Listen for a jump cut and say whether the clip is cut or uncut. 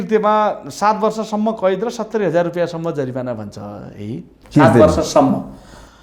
uncut